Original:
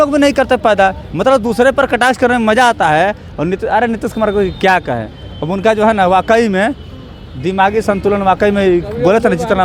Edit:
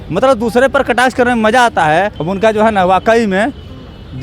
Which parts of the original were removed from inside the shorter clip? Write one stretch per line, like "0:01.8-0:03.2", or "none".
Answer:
0:03.2-0:05.4

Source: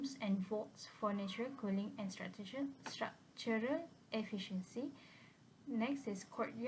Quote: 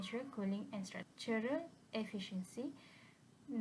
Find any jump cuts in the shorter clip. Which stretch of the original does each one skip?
0:02.3-0:03.3

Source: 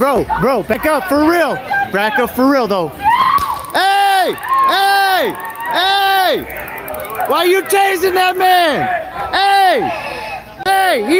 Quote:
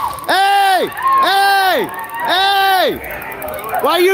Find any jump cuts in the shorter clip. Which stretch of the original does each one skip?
none

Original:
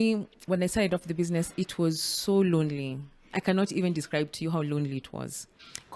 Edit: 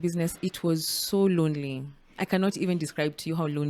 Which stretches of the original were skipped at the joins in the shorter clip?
none

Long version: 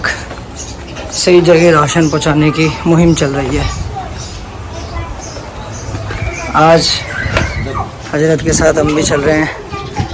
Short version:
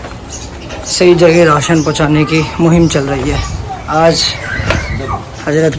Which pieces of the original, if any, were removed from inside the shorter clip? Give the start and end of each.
0:04.0-0:06.4

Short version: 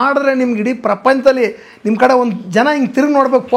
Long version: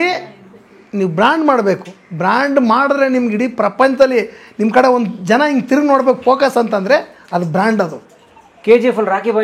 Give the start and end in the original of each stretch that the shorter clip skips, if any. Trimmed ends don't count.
none

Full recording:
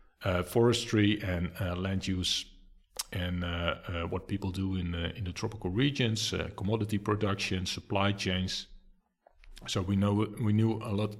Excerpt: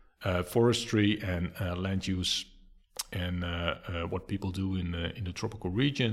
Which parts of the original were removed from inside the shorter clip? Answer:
none

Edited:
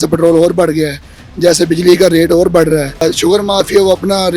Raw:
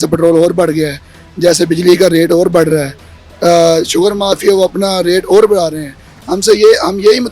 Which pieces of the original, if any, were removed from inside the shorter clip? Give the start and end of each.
0:03.0-0:03.7

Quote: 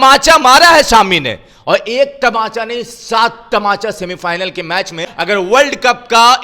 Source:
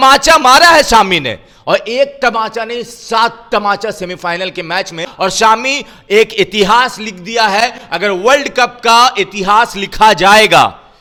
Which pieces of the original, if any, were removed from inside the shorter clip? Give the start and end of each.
0:05.1-0:07.8

